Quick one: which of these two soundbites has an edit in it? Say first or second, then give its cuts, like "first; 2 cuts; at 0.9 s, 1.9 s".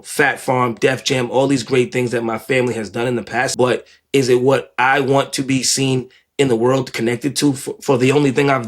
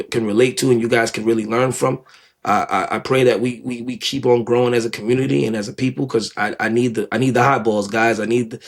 first; 1 cut; at 3.5 s